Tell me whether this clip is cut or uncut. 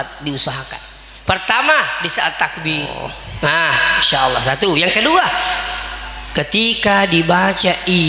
cut